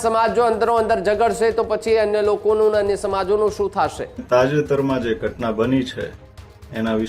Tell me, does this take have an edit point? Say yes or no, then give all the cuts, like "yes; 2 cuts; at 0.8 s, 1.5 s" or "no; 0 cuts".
yes; 1 cut; at 4.1 s